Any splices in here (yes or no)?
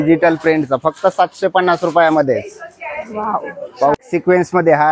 yes